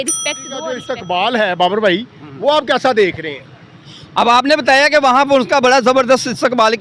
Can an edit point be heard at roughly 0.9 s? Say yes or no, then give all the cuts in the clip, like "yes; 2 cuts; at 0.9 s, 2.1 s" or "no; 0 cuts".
yes; 1 cut; at 0.9 s